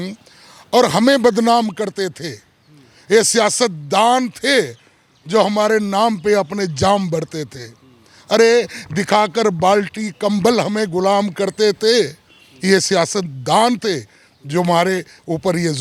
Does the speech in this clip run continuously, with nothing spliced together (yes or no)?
yes